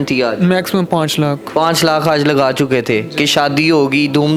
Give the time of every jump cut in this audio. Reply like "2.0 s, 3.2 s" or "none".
none